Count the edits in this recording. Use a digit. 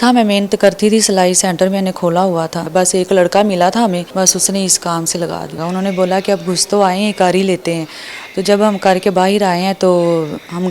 3